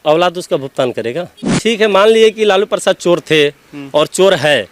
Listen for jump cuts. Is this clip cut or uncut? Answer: cut